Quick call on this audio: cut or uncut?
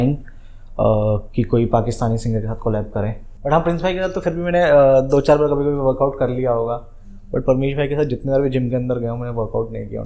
cut